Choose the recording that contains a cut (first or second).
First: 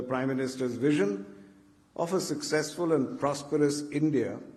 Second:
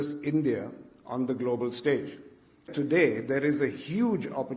second